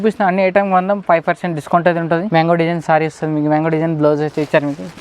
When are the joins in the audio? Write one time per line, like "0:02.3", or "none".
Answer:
0:02.3